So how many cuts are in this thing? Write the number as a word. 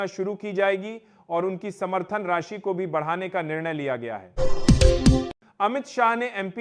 two